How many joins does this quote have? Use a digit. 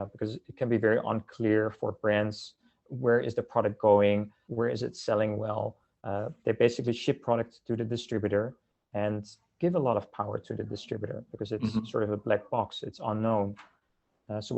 1